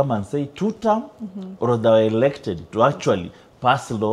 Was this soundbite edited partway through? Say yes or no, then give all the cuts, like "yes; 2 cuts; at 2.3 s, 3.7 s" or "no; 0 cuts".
no; 0 cuts